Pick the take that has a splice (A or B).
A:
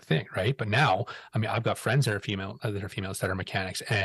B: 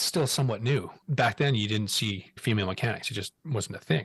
B